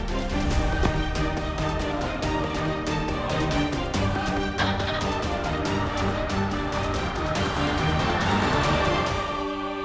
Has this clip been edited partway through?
yes; 1 cut; at 8.9 s

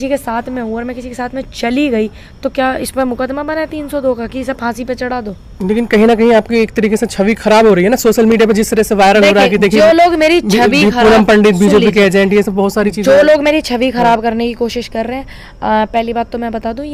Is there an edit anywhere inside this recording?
no; 0 cuts

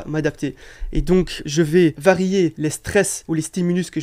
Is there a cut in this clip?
yes; 2 cuts; at 1.4 s, 2.9 s

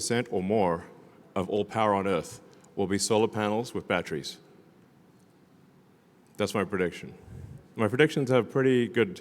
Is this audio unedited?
yes; 0 cuts

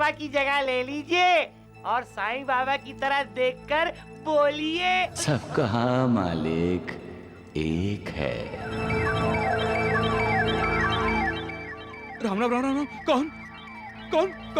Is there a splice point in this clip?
no; 0 cuts

